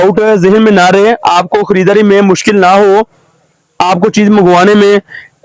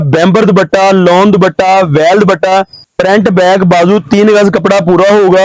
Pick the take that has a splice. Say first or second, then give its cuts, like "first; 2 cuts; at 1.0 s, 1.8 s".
second; 1 cut; at 2.8 s